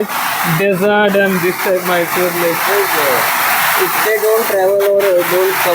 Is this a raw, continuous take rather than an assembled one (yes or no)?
yes